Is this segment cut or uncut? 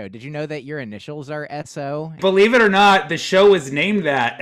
cut